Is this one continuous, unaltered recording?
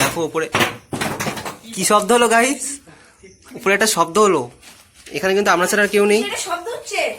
yes; 0 cuts

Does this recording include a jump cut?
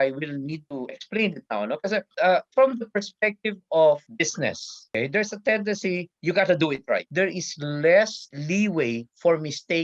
yes; 2 cuts; at 7.1 s, 8.3 s

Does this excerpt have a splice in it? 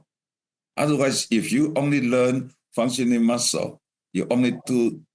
no; 0 cuts

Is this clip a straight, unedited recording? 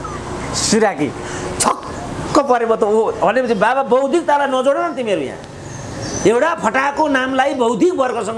yes; 0 cuts

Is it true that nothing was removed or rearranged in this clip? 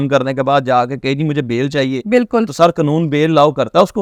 yes; 0 cuts

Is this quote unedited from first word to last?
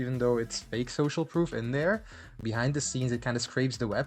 no; 1 cut; at 2.2 s

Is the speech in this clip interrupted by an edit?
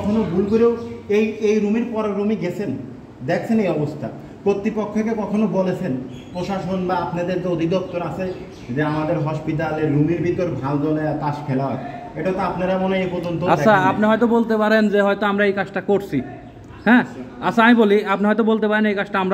no; 0 cuts

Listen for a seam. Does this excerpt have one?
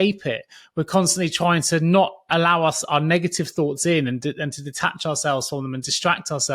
no; 0 cuts

